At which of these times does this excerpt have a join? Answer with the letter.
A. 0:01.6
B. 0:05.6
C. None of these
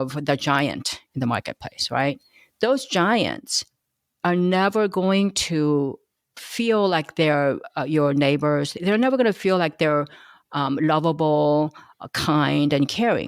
C